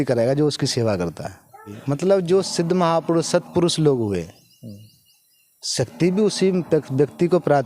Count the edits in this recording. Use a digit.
1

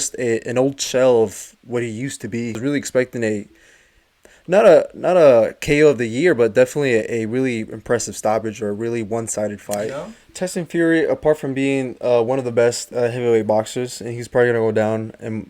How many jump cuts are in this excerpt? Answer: 2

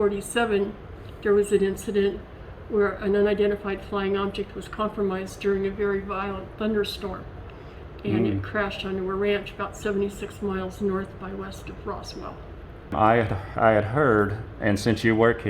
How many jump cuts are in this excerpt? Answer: 1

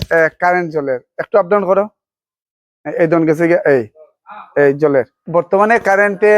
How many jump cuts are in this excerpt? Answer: 1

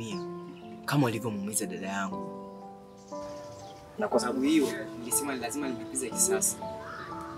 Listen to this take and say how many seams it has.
0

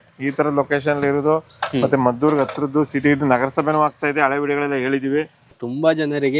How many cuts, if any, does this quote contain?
1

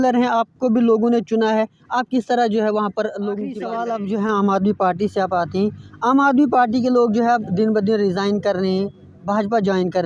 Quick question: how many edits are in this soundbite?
1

